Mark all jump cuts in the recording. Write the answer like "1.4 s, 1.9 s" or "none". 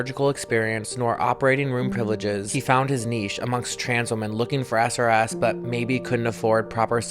2.5 s